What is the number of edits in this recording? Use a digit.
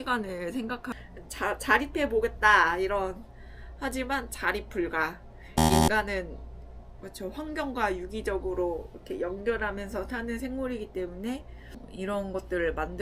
2